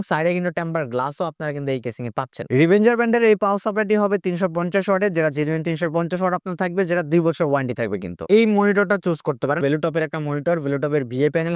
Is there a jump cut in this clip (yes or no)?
yes